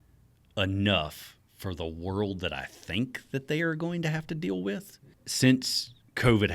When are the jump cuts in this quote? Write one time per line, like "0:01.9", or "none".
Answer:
0:05.1